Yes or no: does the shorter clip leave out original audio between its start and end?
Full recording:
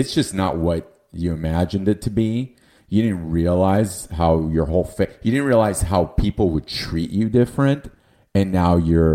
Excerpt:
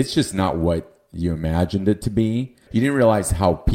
yes